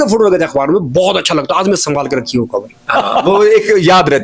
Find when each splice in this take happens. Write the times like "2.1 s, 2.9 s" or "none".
none